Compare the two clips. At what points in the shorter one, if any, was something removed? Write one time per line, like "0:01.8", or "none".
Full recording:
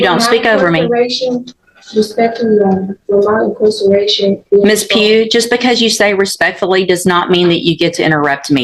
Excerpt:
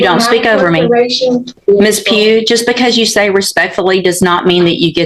0:01.6